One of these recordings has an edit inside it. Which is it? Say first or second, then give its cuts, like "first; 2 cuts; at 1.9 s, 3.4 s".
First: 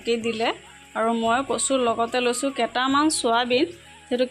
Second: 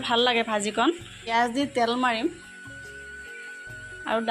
second; 1 cut; at 1.3 s